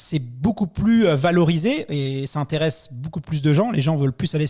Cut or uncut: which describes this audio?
uncut